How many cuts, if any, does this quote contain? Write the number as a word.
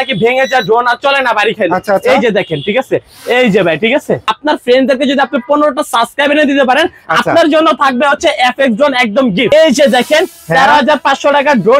two